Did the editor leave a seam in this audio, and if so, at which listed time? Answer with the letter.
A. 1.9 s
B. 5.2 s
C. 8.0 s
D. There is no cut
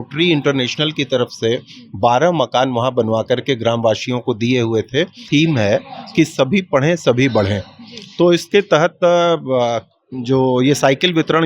B